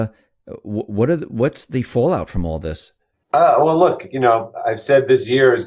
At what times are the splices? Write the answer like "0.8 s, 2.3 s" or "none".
none